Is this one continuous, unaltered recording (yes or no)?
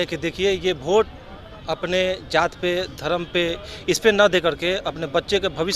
yes